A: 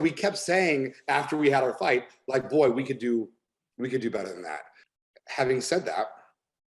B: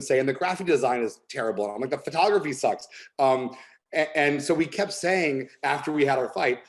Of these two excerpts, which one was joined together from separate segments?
A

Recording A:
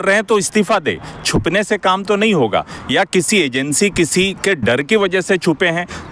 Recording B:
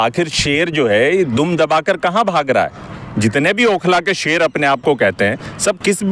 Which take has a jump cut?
B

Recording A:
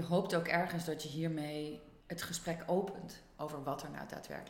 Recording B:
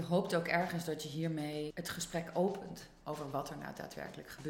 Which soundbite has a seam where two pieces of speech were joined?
B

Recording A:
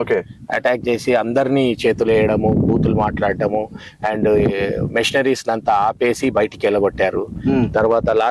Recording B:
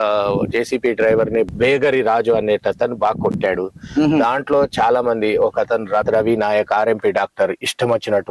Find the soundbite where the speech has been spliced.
B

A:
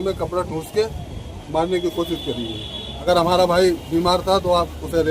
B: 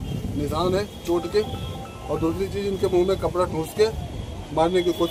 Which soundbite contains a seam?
A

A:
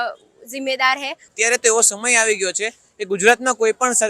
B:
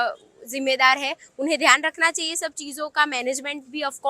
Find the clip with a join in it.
A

